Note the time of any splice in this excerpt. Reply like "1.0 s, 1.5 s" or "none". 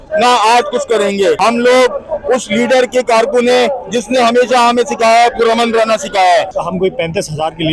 1.4 s, 6.5 s